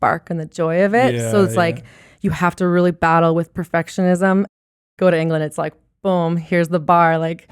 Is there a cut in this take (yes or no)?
yes